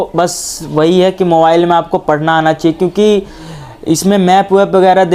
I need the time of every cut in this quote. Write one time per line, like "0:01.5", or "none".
none